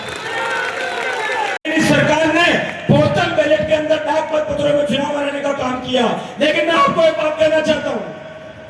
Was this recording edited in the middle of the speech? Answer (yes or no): yes